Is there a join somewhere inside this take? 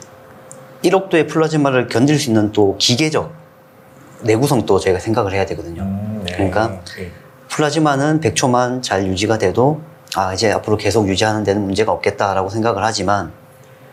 no; 0 cuts

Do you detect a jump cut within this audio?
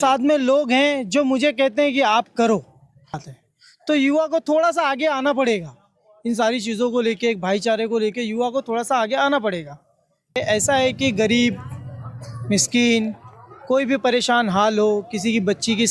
yes; 2 cuts; at 3.3 s, 10.4 s

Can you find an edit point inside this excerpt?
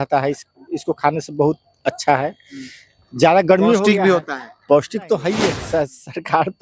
yes; 1 cut; at 5.6 s

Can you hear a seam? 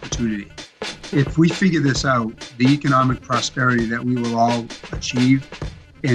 yes; 1 cut; at 4.9 s

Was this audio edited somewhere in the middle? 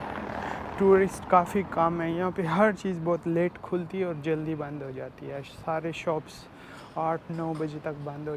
no; 0 cuts

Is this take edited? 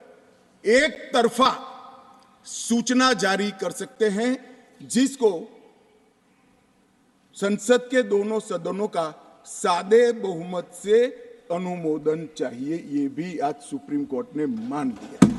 no; 0 cuts

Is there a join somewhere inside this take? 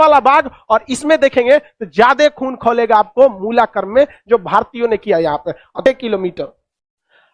yes; 1 cut; at 5.8 s

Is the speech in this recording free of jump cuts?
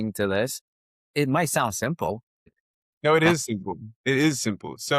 no; 2 cuts; at 0.8 s, 2.5 s

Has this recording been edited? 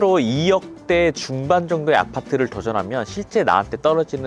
no; 0 cuts

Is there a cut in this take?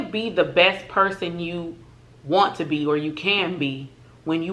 no; 0 cuts

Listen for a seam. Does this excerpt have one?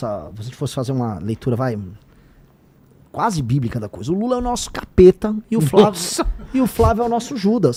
no; 0 cuts

